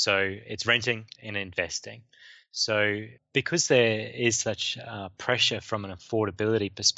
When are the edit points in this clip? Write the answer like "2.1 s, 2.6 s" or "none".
3.2 s